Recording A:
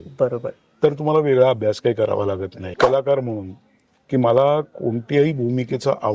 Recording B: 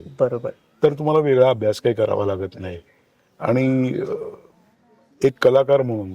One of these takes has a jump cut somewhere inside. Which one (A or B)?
A